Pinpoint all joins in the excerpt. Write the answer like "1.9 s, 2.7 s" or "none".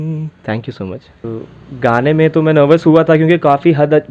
1.2 s